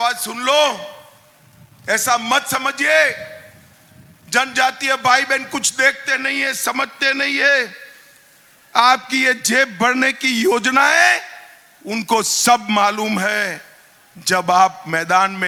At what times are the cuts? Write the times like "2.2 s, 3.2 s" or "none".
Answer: none

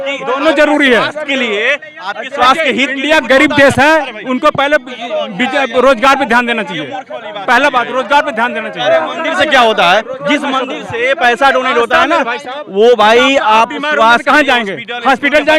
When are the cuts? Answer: none

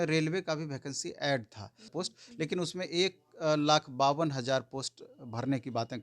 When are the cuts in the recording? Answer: 1.9 s

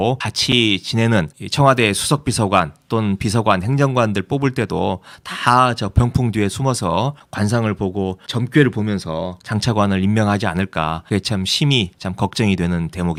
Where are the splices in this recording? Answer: none

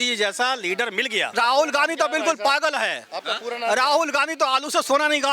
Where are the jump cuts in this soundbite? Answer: 1.3 s

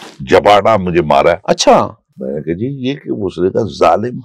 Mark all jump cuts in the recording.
none

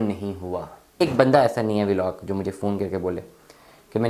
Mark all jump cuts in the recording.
1.0 s

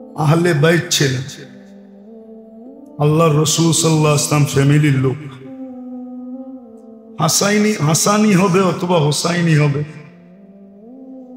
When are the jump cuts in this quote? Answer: 1.3 s, 3.0 s, 5.5 s, 7.1 s, 10.4 s

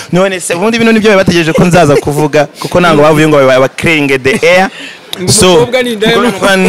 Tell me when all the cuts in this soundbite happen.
none

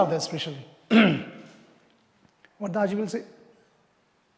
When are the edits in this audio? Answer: none

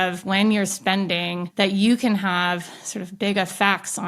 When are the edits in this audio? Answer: 1.4 s

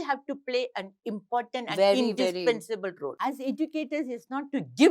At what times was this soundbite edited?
3.1 s

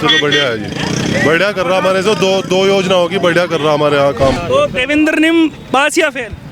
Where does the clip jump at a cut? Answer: 4.4 s

